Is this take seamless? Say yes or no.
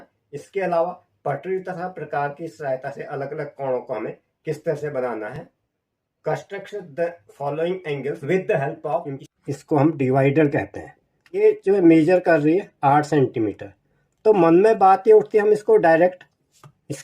no